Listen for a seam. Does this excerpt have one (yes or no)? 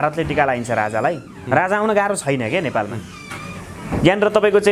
no